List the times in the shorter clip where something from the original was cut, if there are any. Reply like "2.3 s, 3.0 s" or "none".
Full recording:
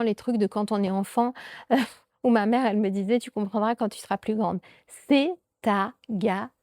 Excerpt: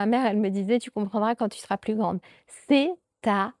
none

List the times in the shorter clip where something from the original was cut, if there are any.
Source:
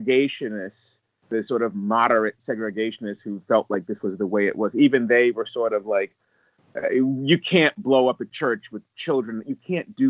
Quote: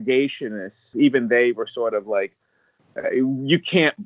0.9 s

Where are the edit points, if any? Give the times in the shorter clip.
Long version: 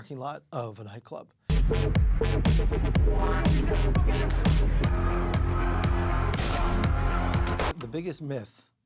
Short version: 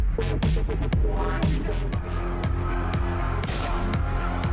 1.9 s

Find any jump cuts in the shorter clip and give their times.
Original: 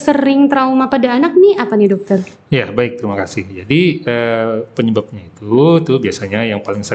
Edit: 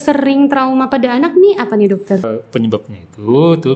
2.3 s

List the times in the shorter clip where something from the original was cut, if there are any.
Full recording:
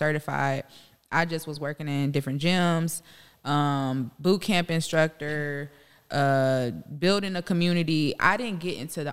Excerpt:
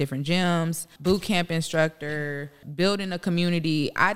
0.9 s, 2.6 s

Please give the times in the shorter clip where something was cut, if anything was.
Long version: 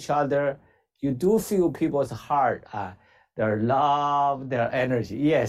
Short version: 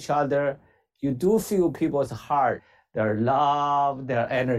2.7 s

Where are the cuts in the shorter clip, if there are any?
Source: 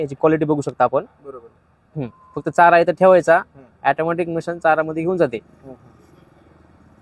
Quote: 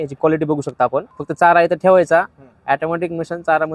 1.2 s

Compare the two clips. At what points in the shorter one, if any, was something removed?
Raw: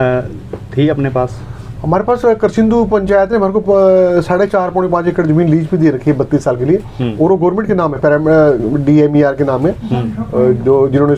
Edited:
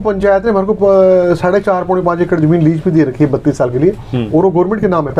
none

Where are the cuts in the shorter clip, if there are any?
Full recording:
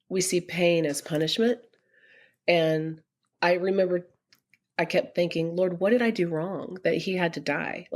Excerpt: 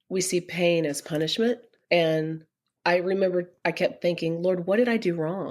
1.7 s, 3.5 s

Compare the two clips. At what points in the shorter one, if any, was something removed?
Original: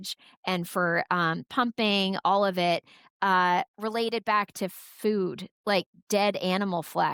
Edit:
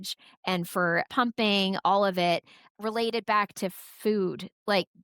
1.1 s, 2.7 s

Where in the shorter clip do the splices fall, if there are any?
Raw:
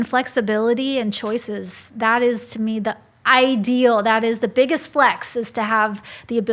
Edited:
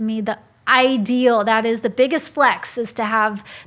none

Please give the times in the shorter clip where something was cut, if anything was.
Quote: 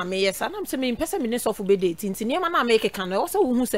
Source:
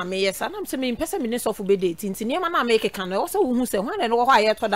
none

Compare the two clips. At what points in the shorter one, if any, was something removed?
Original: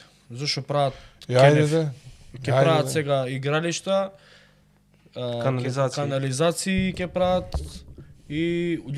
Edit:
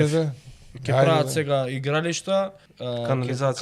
2.7 s

